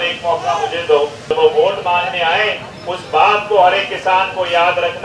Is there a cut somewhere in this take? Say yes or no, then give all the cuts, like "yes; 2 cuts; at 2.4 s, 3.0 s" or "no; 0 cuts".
yes; 1 cut; at 1.3 s